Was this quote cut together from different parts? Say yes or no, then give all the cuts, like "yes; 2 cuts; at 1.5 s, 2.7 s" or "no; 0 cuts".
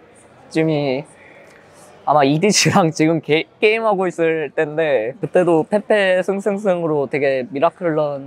yes; 1 cut; at 5.2 s